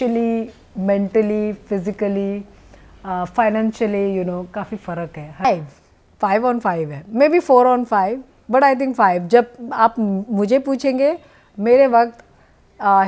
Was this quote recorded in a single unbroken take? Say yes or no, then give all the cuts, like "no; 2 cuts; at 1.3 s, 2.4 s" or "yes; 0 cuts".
no; 1 cut; at 5.4 s